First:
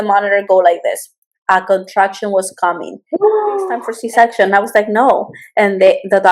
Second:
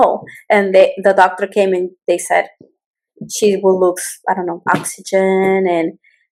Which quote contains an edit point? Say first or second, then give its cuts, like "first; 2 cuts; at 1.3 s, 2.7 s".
first; 1 cut; at 3.9 s